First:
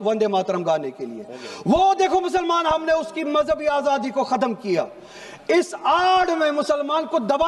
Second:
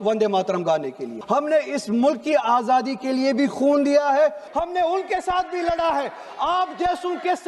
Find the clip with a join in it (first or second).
second